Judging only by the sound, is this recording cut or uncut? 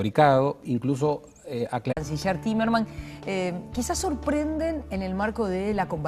uncut